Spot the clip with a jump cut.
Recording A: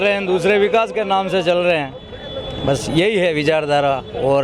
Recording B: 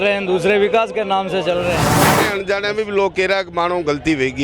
B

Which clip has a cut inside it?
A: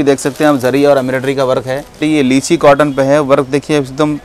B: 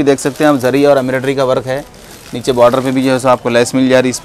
A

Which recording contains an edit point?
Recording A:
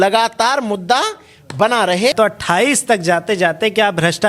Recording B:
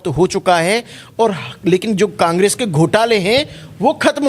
A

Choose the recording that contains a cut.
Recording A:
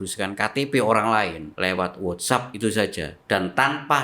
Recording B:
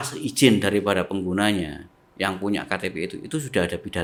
A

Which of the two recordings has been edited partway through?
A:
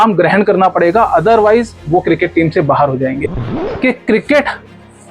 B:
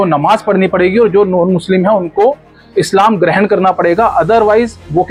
A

